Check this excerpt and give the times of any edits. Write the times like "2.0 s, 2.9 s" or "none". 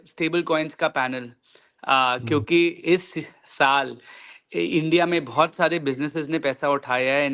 none